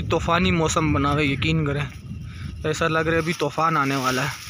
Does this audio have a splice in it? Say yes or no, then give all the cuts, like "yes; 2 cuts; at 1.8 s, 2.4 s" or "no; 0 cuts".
no; 0 cuts